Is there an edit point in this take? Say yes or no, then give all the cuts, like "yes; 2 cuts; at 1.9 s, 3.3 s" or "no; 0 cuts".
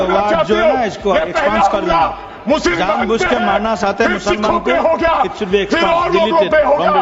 no; 0 cuts